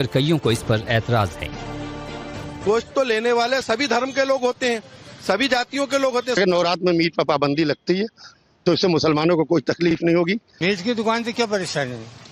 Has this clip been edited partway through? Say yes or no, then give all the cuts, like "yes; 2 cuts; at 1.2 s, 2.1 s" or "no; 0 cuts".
no; 0 cuts